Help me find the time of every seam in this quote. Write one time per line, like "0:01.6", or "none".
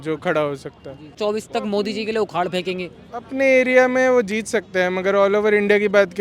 0:01.1